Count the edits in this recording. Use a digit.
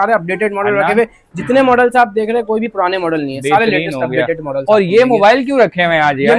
0